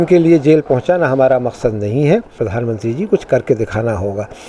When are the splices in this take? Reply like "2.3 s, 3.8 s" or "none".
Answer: 2.4 s